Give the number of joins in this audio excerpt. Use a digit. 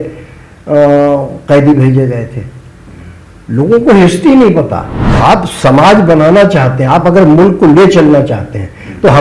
1